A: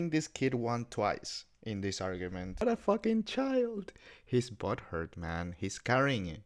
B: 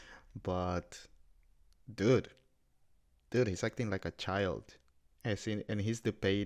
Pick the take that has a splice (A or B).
A